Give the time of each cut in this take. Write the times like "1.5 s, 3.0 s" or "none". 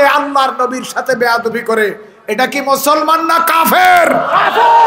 none